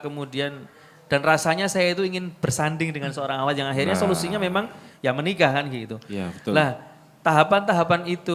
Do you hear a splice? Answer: no; 0 cuts

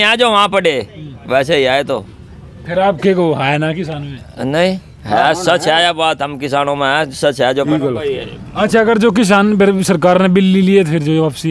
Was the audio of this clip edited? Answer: yes; 1 cut; at 7.7 s

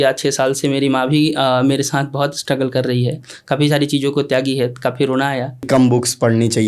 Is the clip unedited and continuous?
no; 1 cut; at 5.7 s

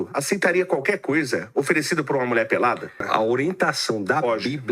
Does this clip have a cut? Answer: yes; 1 cut; at 3.0 s

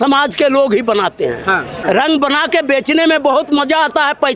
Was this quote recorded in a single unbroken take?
no; 1 cut; at 1.8 s

